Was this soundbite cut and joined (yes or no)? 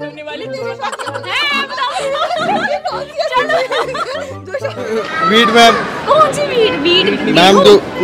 yes